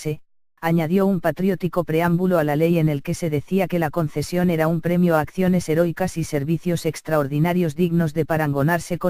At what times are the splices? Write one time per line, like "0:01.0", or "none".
0:07.3